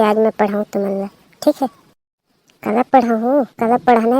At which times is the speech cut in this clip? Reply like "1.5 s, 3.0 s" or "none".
2.4 s